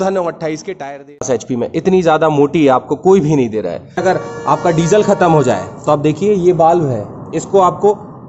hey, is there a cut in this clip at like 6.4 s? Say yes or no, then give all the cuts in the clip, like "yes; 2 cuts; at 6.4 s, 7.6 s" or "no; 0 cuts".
no; 2 cuts; at 1.2 s, 4.0 s